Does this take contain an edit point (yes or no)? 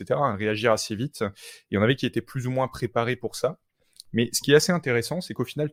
no